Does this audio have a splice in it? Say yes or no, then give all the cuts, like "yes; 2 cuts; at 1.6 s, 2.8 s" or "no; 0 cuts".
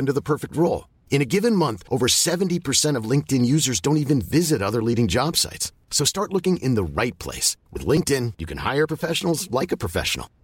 no; 0 cuts